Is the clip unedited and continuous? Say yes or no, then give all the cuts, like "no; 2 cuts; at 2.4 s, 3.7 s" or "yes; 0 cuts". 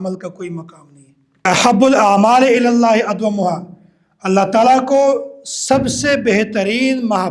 no; 1 cut; at 1.5 s